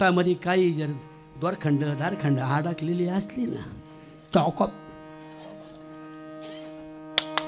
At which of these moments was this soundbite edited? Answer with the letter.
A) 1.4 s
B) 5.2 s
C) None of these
C